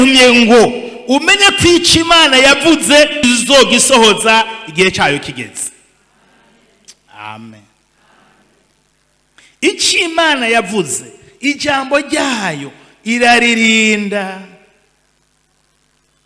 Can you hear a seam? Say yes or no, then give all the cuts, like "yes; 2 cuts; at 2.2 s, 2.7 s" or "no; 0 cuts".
yes; 2 cuts; at 3.2 s, 8.9 s